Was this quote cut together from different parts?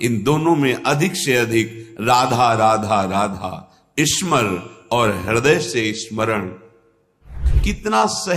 yes; 1 cut; at 7.5 s

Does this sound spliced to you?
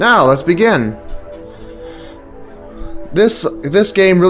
yes; 1 cut; at 3.2 s

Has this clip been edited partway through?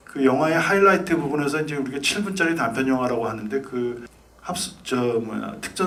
no; 0 cuts

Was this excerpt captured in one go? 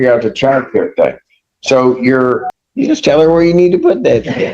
no; 1 cut; at 2.6 s

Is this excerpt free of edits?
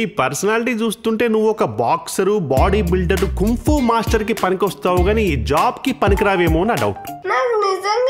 no; 1 cut; at 7.2 s

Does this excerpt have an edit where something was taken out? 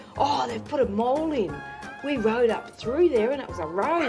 no; 0 cuts

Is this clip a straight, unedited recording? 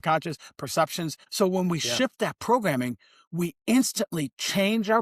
no; 1 cut; at 1.2 s

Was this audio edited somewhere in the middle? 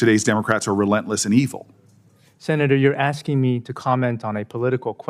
no; 0 cuts

